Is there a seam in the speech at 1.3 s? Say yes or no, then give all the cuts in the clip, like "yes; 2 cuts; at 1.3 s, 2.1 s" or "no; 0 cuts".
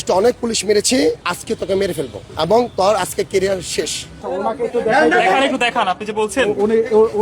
yes; 3 cuts; at 1.3 s, 2.2 s, 4.3 s